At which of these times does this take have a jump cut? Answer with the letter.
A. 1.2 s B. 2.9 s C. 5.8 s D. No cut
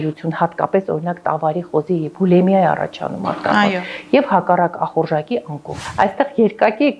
C